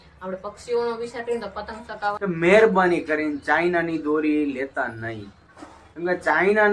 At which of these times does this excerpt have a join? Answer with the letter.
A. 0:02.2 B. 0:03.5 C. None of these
A